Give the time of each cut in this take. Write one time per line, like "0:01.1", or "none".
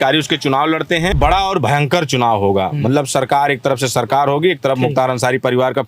0:01.2